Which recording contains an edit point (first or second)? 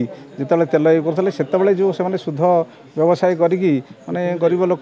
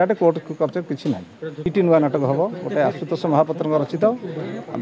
second